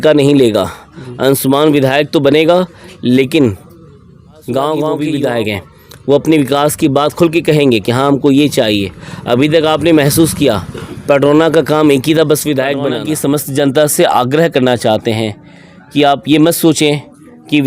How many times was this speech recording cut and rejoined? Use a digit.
2